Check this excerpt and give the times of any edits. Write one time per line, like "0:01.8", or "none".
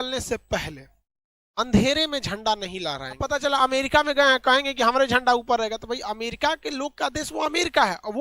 0:03.2